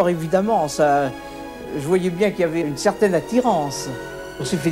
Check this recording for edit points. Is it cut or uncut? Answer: uncut